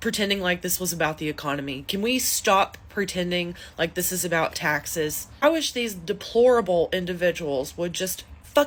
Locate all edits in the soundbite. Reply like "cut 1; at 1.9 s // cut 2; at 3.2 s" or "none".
none